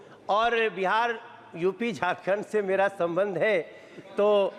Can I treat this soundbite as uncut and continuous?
yes; 0 cuts

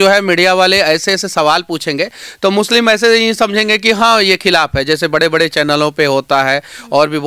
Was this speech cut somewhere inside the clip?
no; 0 cuts

